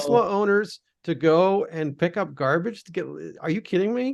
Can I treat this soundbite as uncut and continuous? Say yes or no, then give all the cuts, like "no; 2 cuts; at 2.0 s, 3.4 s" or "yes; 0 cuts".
yes; 0 cuts